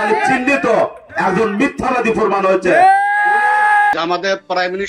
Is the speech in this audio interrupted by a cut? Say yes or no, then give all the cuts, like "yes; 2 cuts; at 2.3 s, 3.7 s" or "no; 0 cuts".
yes; 1 cut; at 3.9 s